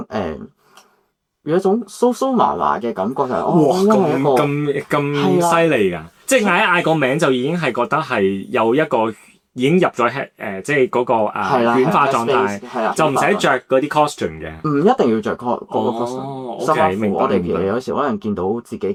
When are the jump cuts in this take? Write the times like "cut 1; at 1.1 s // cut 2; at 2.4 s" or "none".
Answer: none